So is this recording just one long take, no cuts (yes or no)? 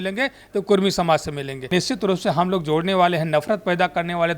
no